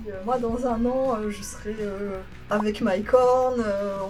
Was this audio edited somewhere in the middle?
no; 0 cuts

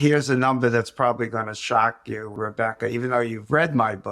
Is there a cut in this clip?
yes; 1 cut; at 2.3 s

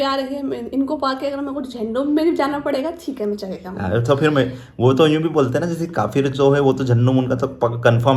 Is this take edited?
no; 0 cuts

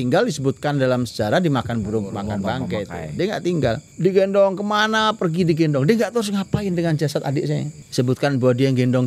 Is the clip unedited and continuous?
no; 2 cuts; at 3.9 s, 7.8 s

